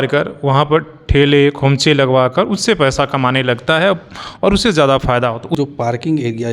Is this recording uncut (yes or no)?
no